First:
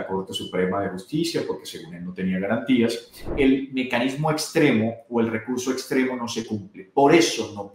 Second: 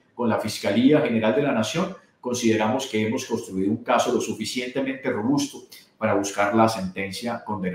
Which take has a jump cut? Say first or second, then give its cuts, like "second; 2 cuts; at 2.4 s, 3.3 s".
first; 1 cut; at 3.2 s